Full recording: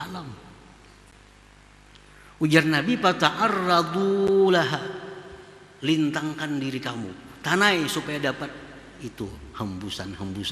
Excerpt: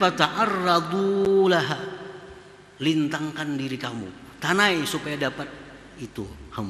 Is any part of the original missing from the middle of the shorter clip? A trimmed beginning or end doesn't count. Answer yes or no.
no